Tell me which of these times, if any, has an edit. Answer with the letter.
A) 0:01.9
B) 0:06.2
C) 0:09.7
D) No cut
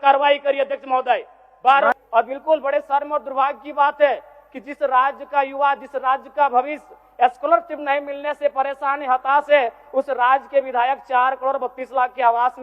A